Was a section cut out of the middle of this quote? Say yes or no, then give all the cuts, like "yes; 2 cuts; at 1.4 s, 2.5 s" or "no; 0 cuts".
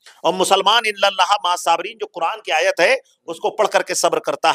no; 0 cuts